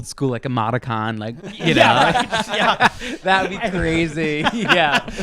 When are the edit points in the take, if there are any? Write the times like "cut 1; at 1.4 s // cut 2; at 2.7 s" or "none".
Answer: cut 1; at 1.6 s